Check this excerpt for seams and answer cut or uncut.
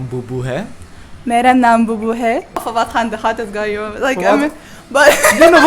cut